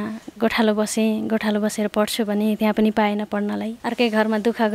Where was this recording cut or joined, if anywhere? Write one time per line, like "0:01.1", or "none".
0:03.8